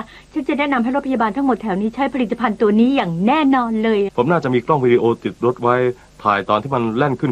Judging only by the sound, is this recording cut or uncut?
cut